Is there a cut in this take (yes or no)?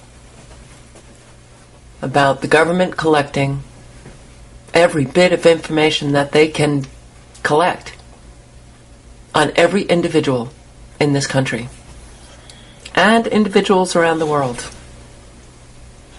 no